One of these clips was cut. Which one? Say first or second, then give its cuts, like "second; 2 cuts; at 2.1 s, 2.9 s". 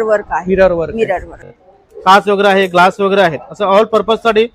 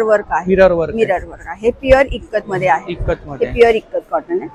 first; 1 cut; at 1.4 s